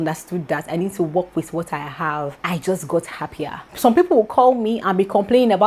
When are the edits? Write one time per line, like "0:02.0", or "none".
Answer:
0:02.4